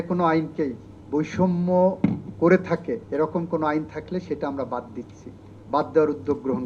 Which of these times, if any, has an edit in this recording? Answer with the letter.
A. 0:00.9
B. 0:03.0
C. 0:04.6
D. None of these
B